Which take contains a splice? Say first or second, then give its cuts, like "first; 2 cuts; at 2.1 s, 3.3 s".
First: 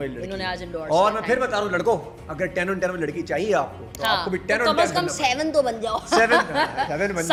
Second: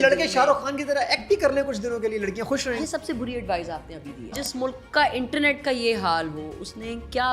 second; 2 cuts; at 2.6 s, 4.4 s